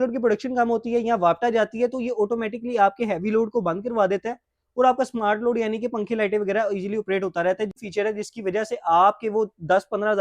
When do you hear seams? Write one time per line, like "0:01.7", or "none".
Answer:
0:07.7